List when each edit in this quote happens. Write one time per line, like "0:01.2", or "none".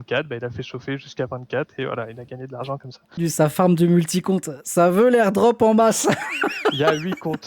0:03.1